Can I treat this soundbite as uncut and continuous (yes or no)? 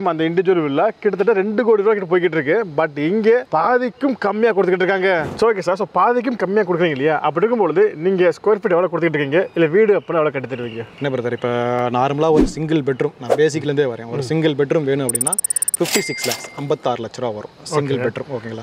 yes